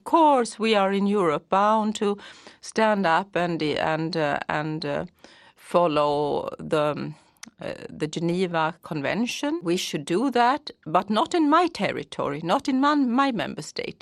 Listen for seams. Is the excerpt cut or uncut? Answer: cut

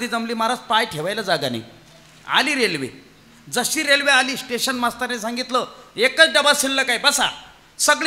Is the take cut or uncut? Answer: uncut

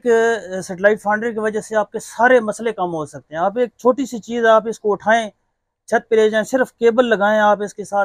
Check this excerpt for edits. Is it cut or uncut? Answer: uncut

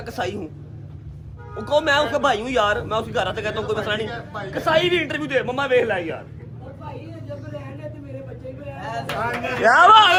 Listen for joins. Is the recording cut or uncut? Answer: uncut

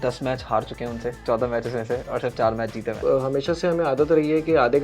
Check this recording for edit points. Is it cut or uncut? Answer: cut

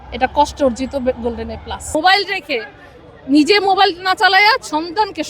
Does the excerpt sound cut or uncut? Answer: cut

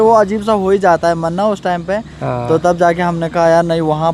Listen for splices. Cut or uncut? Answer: uncut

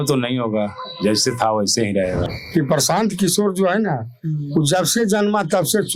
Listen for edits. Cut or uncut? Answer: cut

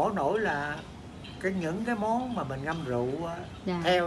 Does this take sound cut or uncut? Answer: uncut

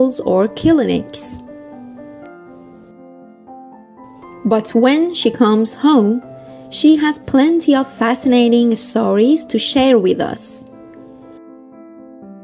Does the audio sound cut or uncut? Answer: cut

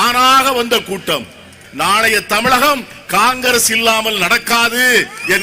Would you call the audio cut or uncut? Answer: cut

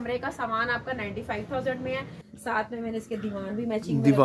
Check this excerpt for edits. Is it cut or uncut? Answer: cut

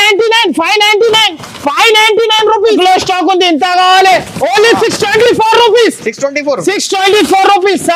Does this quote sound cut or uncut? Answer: cut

